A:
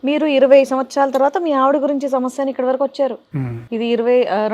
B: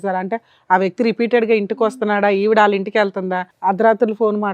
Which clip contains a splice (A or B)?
B